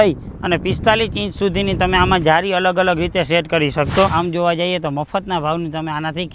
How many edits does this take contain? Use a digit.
1